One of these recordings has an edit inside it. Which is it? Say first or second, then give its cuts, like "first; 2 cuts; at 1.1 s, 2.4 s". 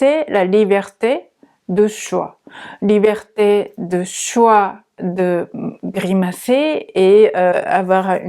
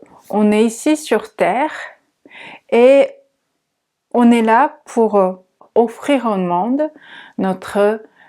second; 1 cut; at 5.6 s